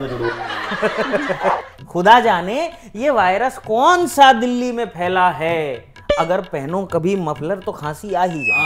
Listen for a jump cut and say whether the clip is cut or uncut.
cut